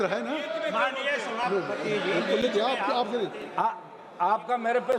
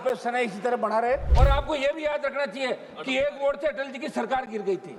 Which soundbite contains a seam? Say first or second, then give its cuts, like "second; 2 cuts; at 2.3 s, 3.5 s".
second; 1 cut; at 1.3 s